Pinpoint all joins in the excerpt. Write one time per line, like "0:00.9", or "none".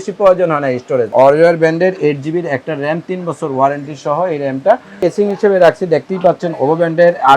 0:01.1
0:05.0

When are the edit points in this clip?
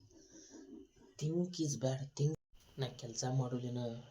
0:02.4

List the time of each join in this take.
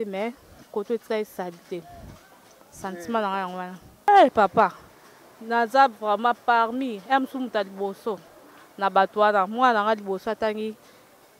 0:04.1

